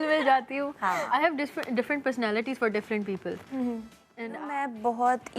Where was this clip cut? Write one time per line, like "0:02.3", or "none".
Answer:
0:04.0